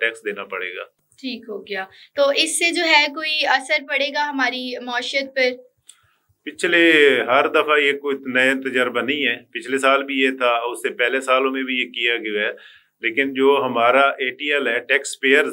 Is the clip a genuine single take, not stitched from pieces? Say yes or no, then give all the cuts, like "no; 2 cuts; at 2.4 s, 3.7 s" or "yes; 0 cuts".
yes; 0 cuts